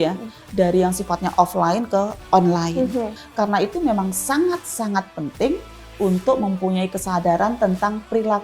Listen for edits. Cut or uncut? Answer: cut